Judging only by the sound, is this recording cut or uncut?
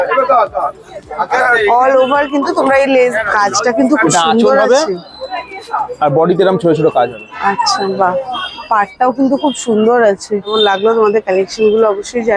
cut